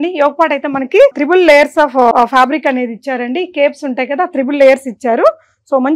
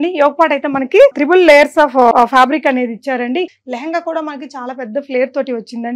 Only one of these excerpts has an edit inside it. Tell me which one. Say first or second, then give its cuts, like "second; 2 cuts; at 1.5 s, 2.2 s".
second; 1 cut; at 3.5 s